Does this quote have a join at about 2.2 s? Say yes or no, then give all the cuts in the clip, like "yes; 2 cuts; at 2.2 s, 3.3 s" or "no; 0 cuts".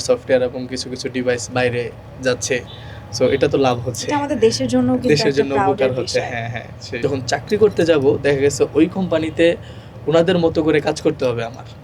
no; 1 cut; at 6.8 s